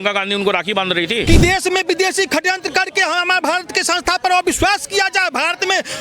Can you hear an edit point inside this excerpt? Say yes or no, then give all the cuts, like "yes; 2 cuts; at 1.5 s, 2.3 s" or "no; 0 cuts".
yes; 1 cut; at 1.2 s